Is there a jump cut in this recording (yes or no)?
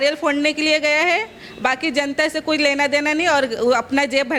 no